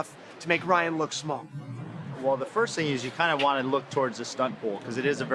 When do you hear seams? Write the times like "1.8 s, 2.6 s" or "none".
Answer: none